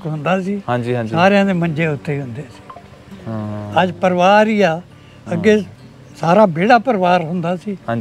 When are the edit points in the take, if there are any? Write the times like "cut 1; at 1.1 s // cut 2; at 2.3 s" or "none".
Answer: none